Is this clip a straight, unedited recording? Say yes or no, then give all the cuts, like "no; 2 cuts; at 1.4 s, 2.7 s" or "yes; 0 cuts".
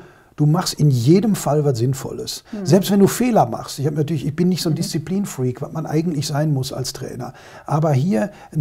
yes; 0 cuts